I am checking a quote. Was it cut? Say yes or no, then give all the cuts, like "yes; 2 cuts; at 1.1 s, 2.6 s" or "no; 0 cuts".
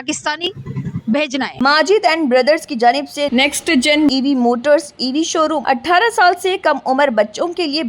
yes; 2 cuts; at 1.5 s, 5.6 s